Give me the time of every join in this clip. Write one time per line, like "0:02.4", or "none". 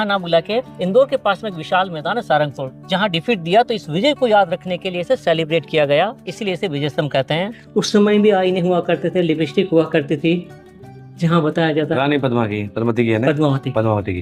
0:07.6